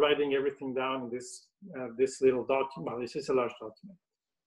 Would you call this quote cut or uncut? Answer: uncut